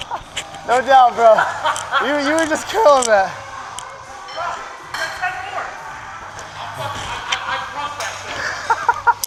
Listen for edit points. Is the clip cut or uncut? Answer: uncut